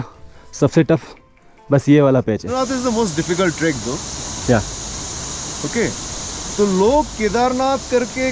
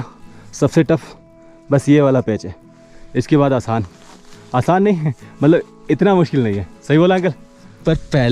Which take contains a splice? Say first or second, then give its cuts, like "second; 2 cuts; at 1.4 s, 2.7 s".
first; 1 cut; at 2.5 s